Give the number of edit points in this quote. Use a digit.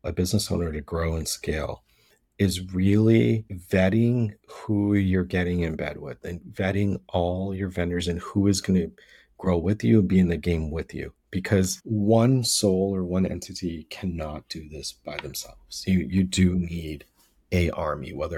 2